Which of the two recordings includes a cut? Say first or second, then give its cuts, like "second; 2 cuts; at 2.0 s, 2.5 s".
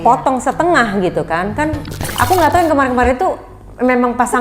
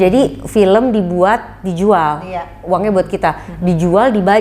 first; 1 cut; at 2.1 s